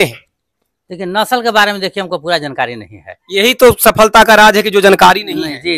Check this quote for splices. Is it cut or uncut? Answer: uncut